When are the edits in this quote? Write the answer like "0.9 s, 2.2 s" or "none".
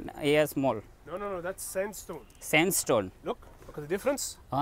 none

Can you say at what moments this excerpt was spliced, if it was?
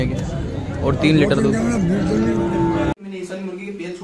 2.9 s

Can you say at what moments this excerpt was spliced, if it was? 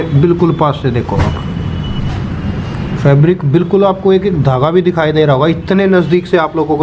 none

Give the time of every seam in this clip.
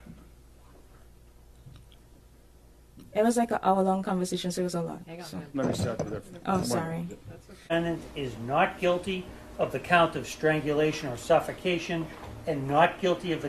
7.7 s

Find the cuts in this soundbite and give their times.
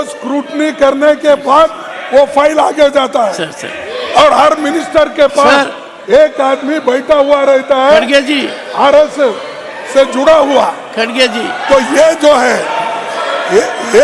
none

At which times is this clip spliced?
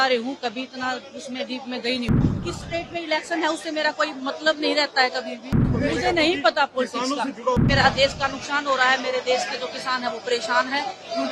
2.1 s, 5.6 s, 7.6 s

